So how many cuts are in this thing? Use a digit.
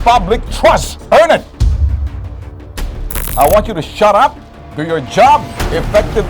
0